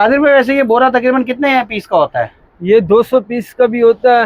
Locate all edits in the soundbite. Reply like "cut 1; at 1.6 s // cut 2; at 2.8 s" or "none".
none